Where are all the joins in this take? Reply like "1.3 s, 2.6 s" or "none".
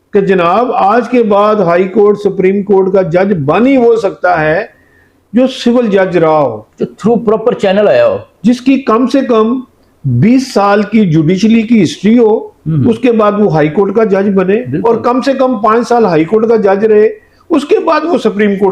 none